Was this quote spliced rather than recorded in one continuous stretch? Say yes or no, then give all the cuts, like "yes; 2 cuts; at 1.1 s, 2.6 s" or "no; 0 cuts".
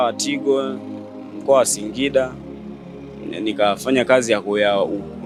no; 0 cuts